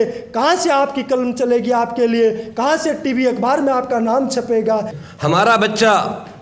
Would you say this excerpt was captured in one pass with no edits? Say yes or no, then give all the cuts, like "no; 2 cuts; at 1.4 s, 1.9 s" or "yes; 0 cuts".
no; 1 cut; at 5.0 s